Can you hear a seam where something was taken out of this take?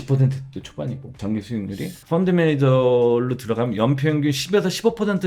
no; 0 cuts

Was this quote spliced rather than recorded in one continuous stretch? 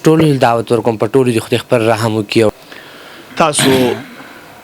yes; 1 cut; at 2.6 s

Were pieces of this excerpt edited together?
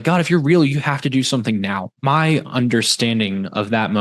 yes; 1 cut; at 1.9 s

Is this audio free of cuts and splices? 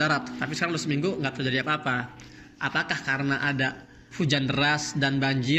yes; 0 cuts

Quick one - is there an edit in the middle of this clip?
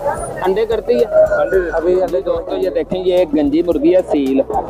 yes; 1 cut; at 2.4 s

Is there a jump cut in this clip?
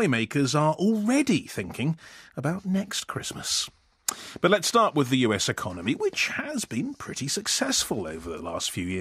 no; 0 cuts

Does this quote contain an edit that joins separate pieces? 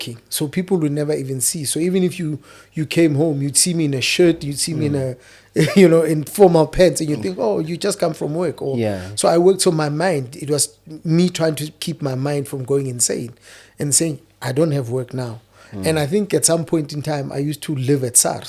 no; 0 cuts

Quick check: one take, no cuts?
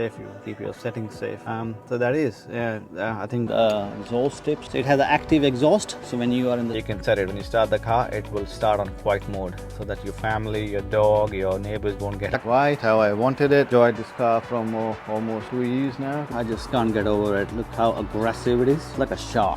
no; 4 cuts; at 3.5 s, 6.8 s, 12.3 s, 16.2 s

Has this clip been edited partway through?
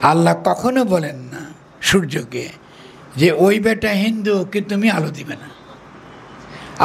no; 0 cuts

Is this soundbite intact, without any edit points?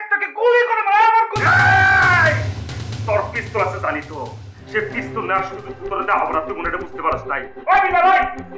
yes; 0 cuts

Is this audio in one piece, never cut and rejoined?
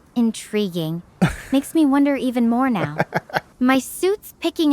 no; 1 cut; at 3.4 s

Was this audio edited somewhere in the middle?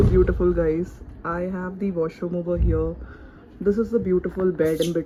no; 0 cuts

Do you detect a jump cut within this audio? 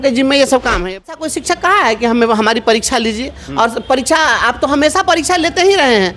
yes; 1 cut; at 1.1 s

